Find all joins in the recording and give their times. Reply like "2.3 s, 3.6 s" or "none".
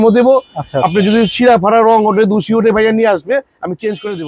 none

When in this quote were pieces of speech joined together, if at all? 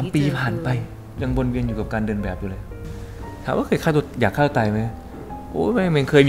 2.9 s

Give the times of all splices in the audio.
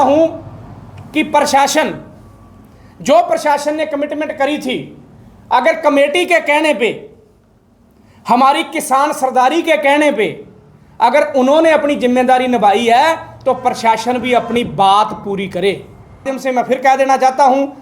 16.3 s

